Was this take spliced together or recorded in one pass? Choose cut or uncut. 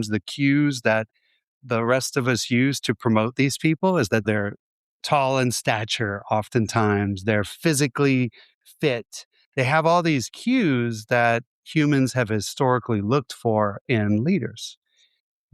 cut